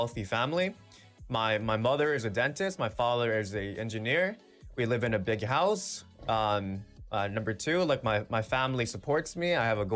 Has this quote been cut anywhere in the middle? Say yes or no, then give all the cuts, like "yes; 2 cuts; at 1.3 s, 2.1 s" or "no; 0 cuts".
no; 0 cuts